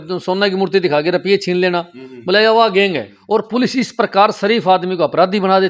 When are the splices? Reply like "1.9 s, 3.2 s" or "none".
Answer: 3.1 s